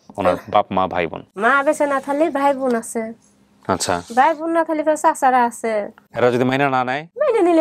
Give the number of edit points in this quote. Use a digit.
1